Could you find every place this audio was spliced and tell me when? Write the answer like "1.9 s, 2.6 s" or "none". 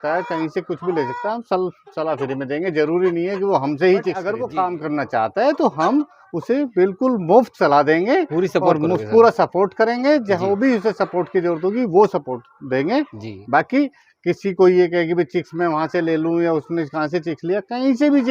4.3 s